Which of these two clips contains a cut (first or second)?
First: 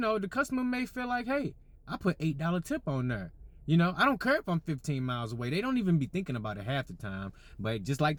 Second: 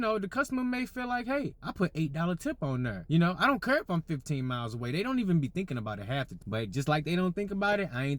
second